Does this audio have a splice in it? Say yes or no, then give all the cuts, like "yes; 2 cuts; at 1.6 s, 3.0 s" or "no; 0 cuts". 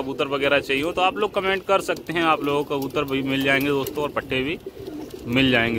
no; 0 cuts